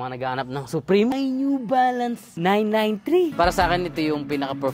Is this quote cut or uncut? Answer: cut